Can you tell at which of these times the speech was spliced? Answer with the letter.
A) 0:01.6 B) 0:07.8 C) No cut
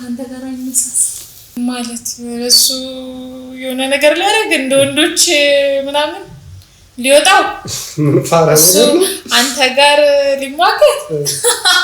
A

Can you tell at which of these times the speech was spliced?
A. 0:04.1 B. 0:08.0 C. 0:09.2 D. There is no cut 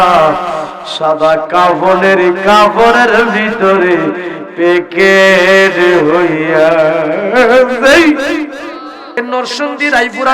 C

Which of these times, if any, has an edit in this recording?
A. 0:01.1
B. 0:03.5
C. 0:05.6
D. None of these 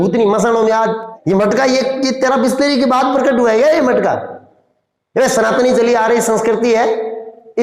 A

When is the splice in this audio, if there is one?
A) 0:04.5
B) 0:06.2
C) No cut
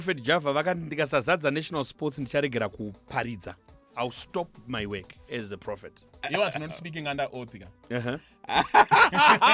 B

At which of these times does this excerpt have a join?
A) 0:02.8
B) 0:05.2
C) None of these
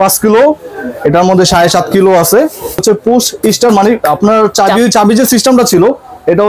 A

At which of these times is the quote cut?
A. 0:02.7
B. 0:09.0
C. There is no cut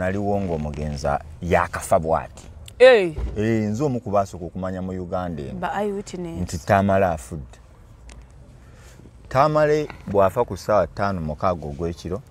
C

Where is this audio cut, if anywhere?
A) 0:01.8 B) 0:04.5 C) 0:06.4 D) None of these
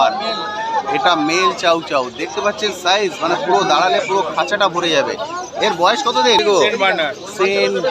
C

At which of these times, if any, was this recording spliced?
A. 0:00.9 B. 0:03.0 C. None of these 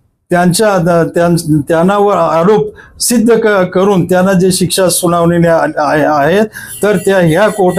C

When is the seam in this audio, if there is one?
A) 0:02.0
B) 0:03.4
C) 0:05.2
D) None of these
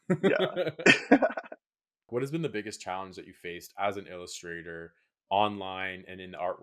A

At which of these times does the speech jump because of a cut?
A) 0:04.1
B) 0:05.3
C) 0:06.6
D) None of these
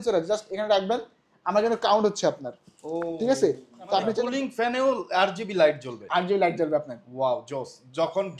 A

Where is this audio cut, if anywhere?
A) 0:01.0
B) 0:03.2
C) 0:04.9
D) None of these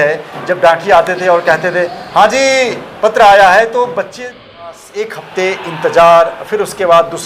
C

